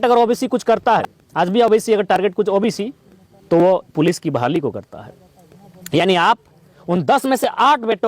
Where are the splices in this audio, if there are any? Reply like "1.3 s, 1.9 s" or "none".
1.2 s